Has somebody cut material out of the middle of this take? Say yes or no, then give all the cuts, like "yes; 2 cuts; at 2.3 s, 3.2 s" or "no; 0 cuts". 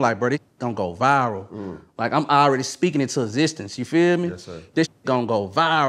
no; 0 cuts